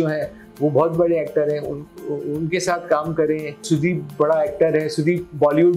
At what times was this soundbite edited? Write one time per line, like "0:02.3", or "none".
0:03.6

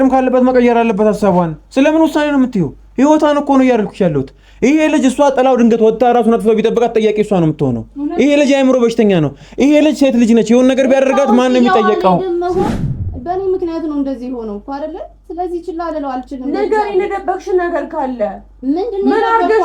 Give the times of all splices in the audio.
0:12.7

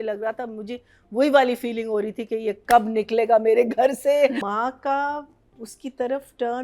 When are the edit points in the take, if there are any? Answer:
0:04.4

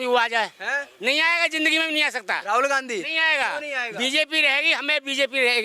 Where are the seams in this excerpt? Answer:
none

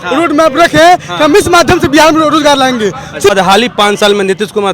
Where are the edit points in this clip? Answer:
0:03.3

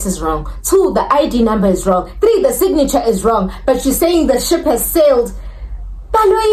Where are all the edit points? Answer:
none

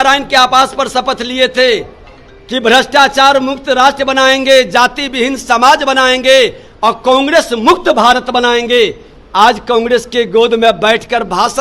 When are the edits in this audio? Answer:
none

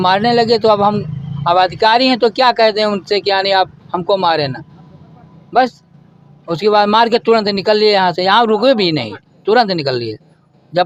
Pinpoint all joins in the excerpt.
none

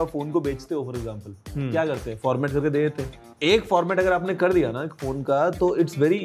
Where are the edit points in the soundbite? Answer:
0:03.2

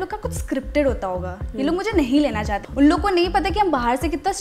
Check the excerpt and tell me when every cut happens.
0:02.6

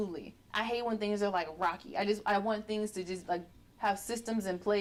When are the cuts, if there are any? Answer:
none

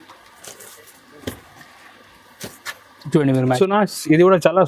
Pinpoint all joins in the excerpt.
0:03.6

